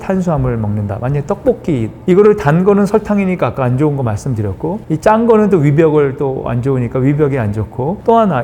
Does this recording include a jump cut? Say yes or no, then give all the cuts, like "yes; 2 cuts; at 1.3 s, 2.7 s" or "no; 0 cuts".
no; 0 cuts